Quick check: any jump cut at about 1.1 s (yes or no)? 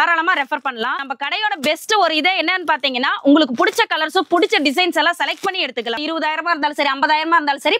yes